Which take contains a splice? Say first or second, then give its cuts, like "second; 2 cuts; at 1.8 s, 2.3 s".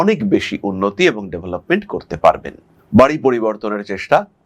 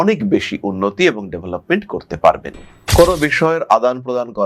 second; 1 cut; at 2.7 s